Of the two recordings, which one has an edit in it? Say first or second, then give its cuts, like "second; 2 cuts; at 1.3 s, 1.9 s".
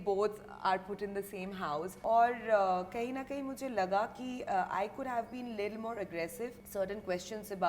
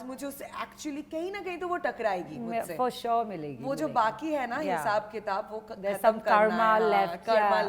first; 2 cuts; at 1.9 s, 6.6 s